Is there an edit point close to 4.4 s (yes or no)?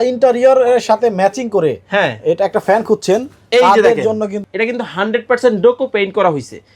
yes